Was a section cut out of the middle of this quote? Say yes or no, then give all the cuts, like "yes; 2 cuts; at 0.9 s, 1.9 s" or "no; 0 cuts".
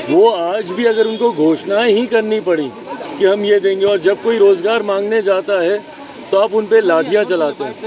no; 0 cuts